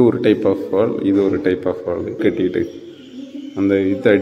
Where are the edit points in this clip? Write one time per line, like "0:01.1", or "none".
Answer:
0:02.2